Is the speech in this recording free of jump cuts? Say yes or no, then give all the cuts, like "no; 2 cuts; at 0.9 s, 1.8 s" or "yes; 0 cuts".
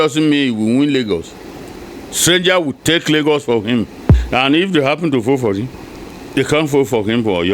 no; 1 cut; at 4.2 s